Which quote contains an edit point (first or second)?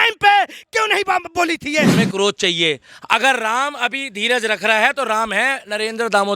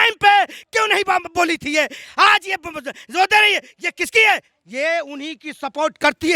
first